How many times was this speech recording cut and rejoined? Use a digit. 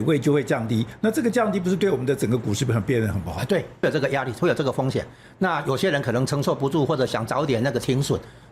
1